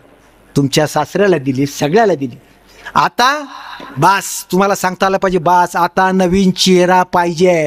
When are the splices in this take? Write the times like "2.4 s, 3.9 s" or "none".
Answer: none